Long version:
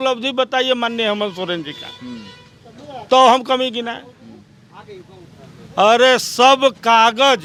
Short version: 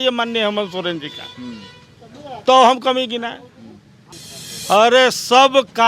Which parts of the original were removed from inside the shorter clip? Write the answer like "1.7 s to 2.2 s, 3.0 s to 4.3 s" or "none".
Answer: 4.7 s to 5.1 s